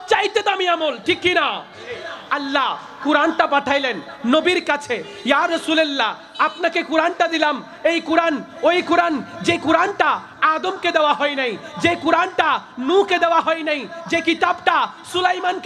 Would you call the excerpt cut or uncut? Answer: cut